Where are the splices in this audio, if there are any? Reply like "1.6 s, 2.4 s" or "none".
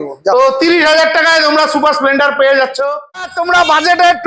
3.3 s

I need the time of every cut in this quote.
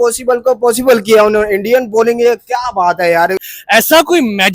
3.4 s

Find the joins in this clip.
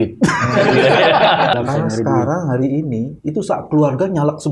1.5 s

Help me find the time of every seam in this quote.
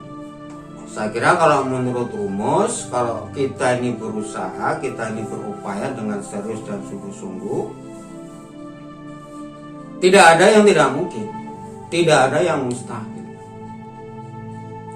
1.0 s

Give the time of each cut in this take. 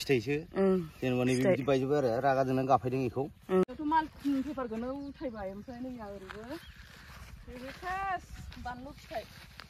3.6 s

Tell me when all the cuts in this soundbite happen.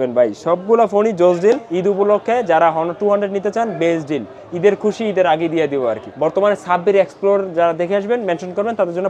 1.7 s, 6.1 s

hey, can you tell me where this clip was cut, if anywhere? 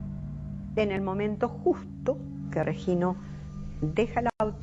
none

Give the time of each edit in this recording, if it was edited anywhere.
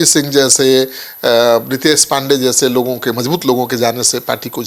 none

